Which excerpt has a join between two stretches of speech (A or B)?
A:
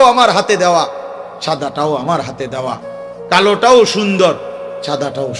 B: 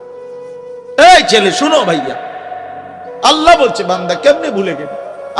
B